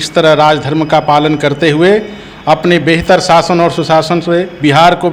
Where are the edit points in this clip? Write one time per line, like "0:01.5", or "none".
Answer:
none

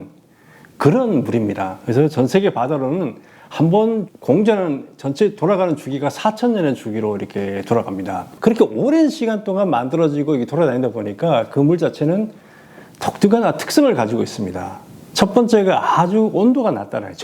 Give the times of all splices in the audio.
0:08.2

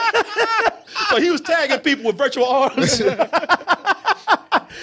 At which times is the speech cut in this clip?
none

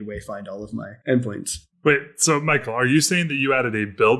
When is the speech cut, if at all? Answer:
0:00.9

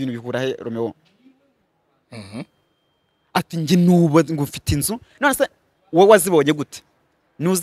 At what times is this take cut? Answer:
none

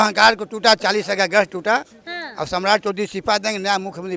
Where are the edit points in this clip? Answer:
none

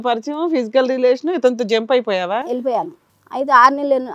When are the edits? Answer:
0:02.6

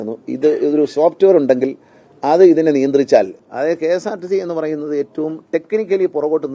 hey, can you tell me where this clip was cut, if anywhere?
0:03.4

